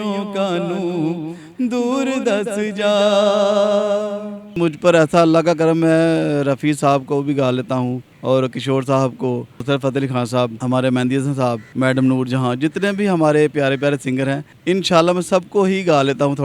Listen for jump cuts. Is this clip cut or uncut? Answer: cut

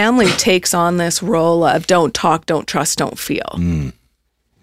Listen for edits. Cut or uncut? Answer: uncut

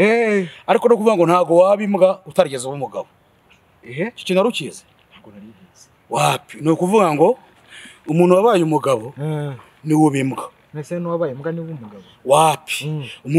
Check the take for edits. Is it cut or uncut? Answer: uncut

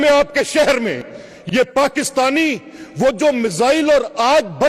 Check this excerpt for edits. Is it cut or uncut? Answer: uncut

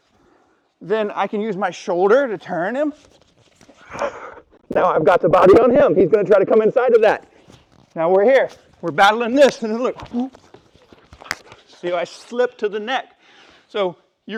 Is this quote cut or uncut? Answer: uncut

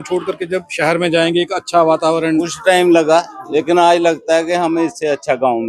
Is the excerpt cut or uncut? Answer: uncut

